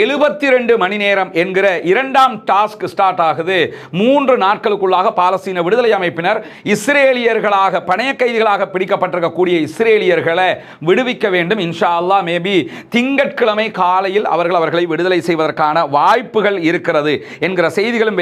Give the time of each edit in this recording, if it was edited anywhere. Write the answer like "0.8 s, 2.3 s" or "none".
none